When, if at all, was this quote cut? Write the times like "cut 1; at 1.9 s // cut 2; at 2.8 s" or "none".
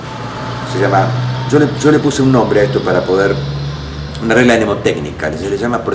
cut 1; at 2.7 s